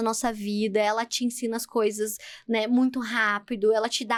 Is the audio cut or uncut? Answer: uncut